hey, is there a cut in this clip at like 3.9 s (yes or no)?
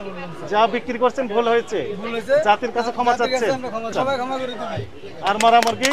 yes